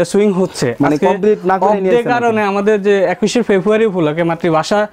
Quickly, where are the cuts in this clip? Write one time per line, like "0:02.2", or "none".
none